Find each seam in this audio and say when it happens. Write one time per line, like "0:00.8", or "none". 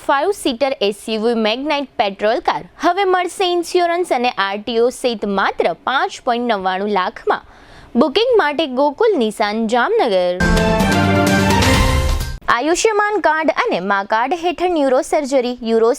0:10.4
0:12.3